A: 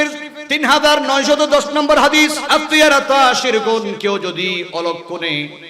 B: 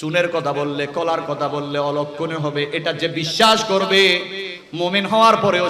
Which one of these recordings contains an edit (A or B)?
A